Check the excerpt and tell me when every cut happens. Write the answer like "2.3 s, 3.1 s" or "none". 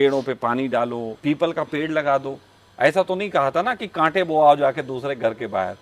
1.1 s